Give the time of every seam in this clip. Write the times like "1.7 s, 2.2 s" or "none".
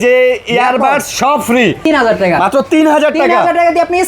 1.8 s